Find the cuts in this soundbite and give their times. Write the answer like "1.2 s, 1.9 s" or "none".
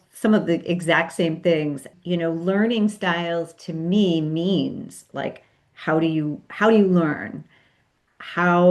1.9 s